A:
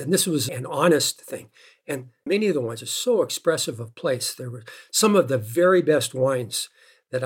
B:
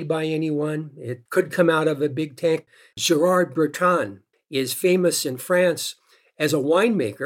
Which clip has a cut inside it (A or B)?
B